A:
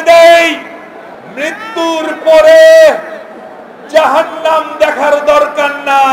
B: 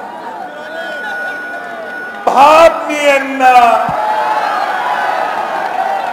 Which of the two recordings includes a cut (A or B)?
A